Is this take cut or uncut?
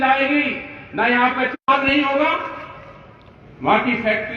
uncut